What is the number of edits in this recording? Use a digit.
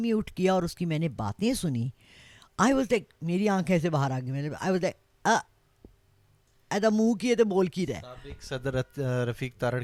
0